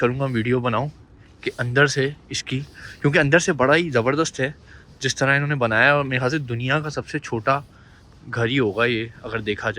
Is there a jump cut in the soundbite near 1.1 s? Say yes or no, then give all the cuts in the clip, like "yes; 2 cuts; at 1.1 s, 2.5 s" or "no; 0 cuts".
no; 0 cuts